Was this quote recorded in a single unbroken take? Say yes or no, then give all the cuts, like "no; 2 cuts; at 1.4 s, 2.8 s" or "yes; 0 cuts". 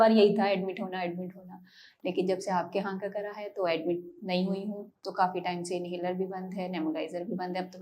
no; 1 cut; at 4.9 s